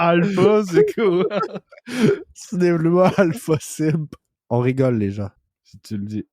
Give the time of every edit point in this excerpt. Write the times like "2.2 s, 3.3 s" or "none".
4.3 s, 5.4 s